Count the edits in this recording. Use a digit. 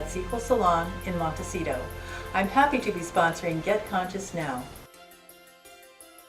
1